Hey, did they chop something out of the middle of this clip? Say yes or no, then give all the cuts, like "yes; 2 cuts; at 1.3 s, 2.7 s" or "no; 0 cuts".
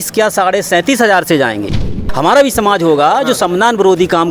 yes; 1 cut; at 1.9 s